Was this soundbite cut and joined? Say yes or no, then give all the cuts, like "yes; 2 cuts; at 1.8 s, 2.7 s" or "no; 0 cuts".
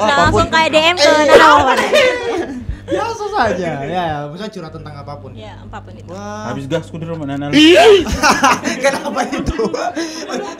no; 0 cuts